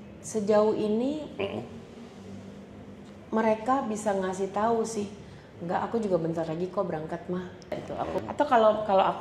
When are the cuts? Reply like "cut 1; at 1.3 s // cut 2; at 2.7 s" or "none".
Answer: cut 1; at 8.1 s